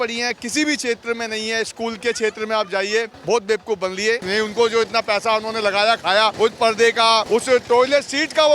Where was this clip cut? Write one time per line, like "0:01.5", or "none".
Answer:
0:03.1
0:04.2
0:06.3
0:07.2